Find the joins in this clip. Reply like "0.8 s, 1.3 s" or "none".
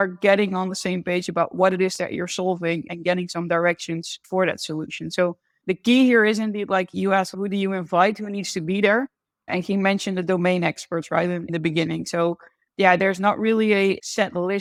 none